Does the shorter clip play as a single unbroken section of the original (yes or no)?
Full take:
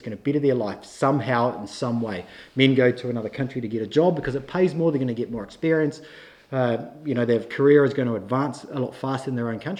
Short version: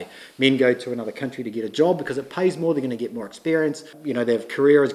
no